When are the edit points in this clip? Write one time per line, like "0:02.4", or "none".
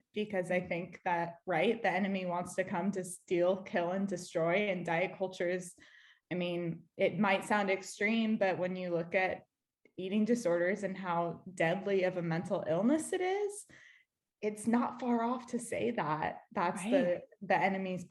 none